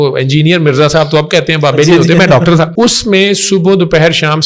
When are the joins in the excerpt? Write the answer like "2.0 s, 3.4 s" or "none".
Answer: 2.7 s

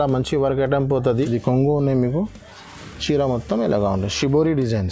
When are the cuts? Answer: 1.1 s

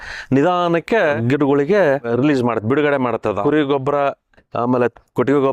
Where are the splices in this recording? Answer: 1.2 s, 2.1 s, 3.4 s

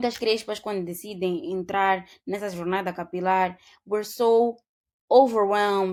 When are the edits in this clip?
none

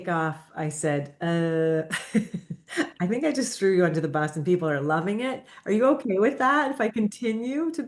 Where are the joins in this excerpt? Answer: none

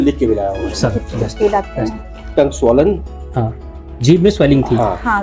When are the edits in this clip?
2.3 s

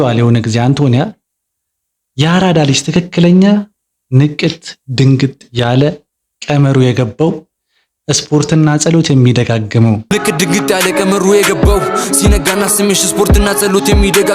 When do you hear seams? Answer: 10.1 s

